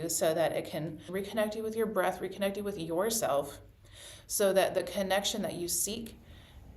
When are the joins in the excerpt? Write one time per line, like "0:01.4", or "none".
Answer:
0:01.0